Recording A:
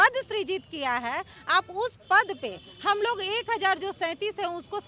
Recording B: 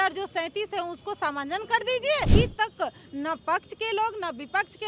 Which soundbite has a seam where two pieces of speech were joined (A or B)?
B